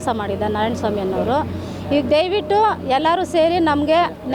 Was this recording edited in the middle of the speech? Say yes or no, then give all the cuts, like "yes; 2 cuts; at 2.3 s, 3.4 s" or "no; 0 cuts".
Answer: no; 0 cuts